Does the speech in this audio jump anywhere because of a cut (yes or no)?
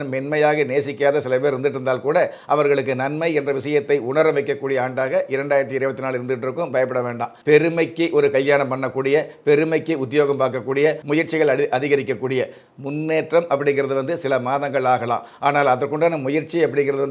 yes